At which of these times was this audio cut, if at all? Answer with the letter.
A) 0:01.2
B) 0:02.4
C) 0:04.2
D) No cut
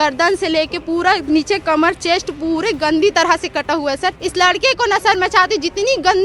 C